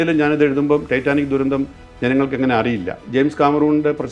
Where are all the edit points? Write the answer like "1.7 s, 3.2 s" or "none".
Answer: 3.0 s